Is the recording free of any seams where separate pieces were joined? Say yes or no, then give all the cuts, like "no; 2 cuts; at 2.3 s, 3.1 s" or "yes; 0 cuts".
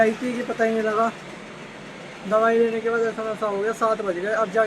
yes; 0 cuts